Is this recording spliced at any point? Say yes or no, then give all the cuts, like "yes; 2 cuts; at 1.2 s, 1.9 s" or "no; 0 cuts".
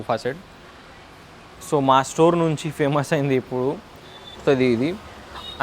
yes; 1 cut; at 4.4 s